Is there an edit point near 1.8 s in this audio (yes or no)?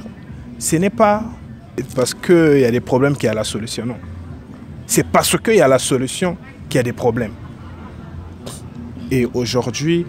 yes